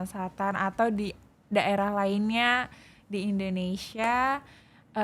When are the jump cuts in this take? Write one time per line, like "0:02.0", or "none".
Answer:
none

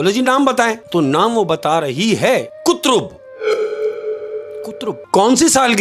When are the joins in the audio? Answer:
0:00.8
0:02.5
0:03.2
0:04.5

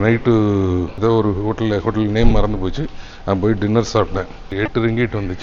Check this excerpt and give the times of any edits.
0:00.9
0:04.5

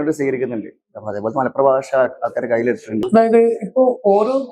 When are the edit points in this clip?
0:03.1

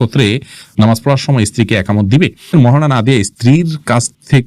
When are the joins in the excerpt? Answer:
0:02.5

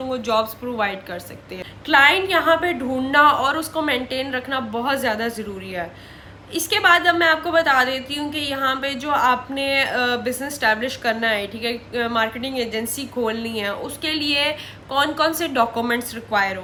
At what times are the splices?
none

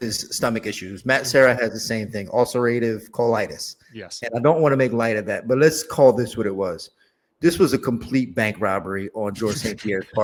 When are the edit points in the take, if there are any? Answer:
none

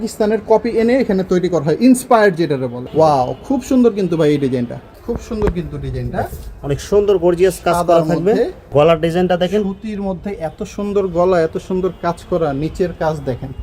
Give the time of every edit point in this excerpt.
0:02.8
0:04.9
0:08.6

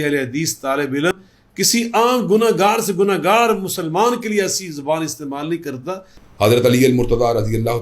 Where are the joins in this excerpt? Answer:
0:01.1
0:06.1

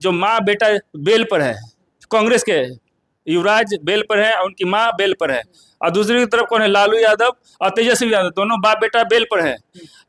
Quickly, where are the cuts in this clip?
none

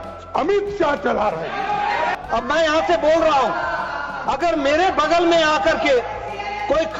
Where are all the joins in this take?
0:02.2

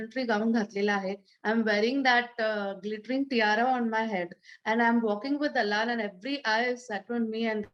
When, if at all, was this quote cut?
none

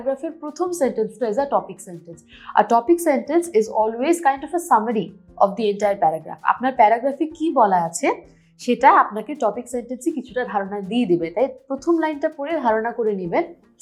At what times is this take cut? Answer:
none

